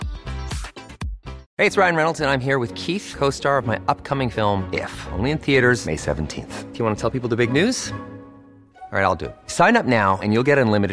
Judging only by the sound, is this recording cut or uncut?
cut